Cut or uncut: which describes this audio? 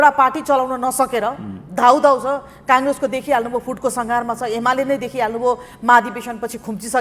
uncut